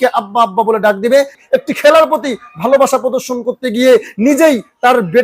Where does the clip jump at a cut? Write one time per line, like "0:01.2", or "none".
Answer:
0:01.4